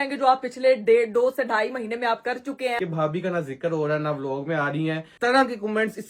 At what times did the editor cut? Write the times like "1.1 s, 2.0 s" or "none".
2.8 s, 5.1 s